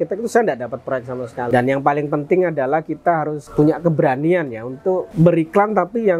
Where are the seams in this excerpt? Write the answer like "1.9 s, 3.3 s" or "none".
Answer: 1.5 s, 3.4 s, 5.1 s

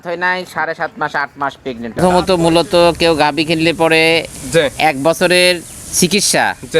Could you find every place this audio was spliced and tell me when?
2.0 s

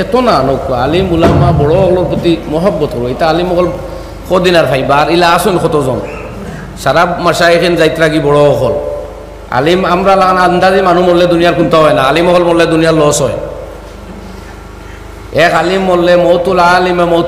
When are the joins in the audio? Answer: none

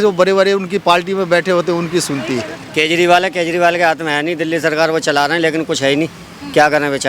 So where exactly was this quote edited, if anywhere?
2.6 s

